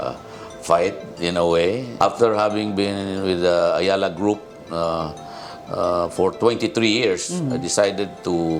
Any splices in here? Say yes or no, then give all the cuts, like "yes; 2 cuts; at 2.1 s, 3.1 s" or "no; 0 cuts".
no; 0 cuts